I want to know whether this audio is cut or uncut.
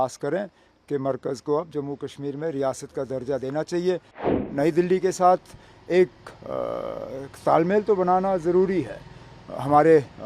cut